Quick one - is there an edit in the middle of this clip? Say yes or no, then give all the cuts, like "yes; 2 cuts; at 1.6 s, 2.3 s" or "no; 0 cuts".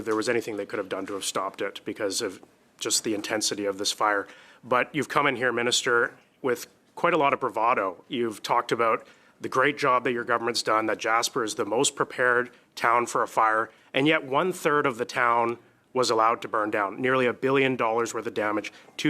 no; 0 cuts